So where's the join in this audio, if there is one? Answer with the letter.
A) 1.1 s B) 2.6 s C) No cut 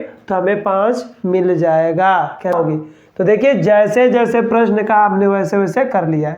B